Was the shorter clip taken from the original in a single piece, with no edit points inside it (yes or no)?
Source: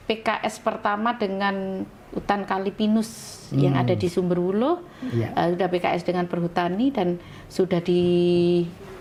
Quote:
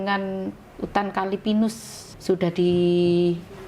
no